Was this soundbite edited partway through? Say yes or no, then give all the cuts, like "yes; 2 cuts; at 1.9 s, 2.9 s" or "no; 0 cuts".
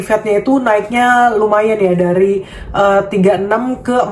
no; 0 cuts